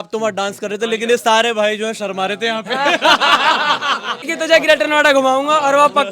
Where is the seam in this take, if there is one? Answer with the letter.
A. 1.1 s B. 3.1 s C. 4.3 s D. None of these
C